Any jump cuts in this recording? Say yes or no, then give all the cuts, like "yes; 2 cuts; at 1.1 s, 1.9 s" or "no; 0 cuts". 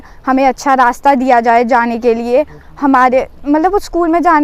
no; 0 cuts